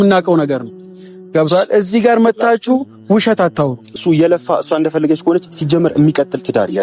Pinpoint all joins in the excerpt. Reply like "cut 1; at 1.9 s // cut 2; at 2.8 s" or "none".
cut 1; at 3.9 s